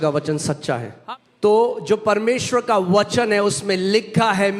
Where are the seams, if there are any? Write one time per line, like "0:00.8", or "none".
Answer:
0:00.9